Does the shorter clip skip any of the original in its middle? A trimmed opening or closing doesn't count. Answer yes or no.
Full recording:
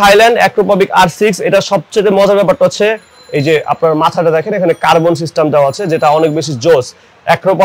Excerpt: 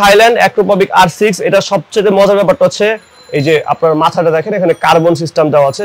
no